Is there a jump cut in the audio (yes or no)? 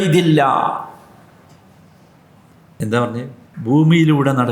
yes